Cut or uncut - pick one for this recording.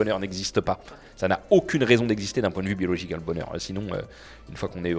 uncut